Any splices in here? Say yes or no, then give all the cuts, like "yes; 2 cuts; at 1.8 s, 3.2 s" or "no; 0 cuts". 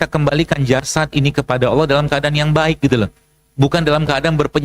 no; 0 cuts